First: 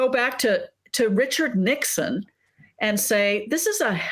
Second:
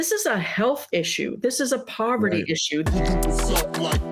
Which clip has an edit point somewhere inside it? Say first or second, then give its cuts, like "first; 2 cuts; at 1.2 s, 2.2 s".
second; 1 cut; at 2.9 s